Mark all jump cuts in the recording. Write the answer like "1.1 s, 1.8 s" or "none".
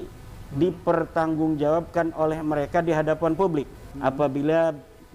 3.8 s

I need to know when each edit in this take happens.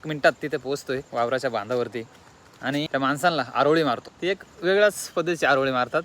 1.1 s, 2.9 s, 4.1 s

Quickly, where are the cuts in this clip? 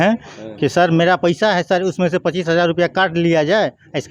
none

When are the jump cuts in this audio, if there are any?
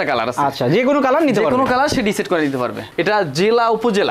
2.8 s

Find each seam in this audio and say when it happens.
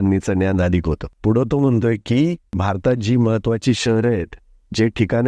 1.1 s, 2.6 s

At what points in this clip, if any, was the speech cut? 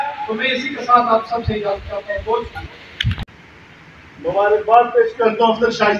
3.4 s

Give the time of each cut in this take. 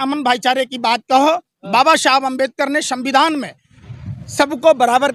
none

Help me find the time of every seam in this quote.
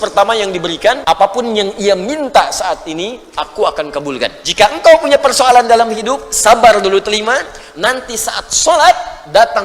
1.0 s, 4.4 s

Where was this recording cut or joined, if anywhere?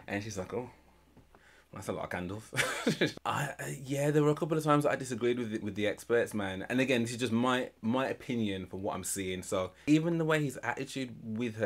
3.1 s, 5.6 s, 9.8 s

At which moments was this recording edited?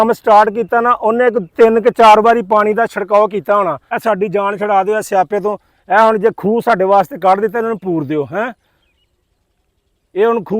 3.8 s

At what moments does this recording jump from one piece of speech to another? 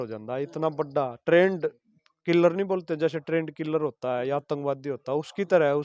none

